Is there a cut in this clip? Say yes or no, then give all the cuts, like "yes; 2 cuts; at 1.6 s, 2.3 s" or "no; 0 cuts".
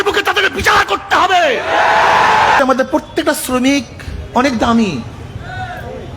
yes; 1 cut; at 2.6 s